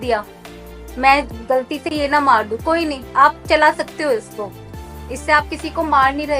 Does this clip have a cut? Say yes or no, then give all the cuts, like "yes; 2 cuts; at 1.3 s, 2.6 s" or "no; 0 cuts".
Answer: no; 0 cuts